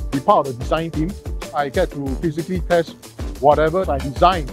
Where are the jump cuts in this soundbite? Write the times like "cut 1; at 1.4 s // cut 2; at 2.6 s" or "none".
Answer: none